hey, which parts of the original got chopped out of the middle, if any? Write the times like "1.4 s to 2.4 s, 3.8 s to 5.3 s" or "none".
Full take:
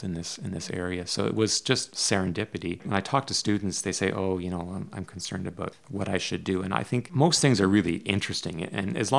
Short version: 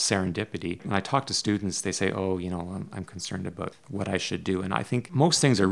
none